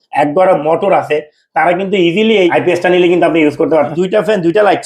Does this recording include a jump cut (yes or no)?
yes